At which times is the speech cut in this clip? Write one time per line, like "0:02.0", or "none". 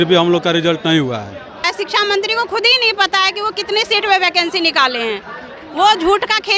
0:01.6